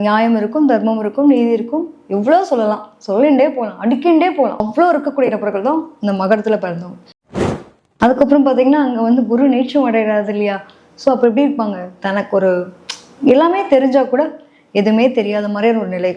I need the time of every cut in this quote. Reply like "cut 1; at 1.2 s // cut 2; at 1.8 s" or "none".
cut 1; at 7.4 s